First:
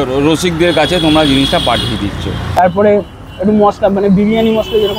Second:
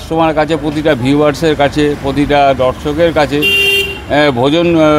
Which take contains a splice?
first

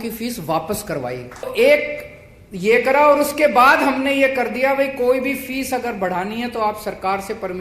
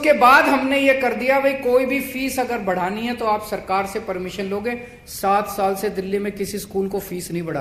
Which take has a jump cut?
first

